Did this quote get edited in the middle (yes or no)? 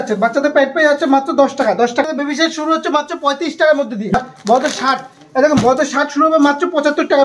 yes